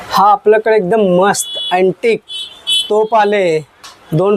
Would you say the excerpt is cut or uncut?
uncut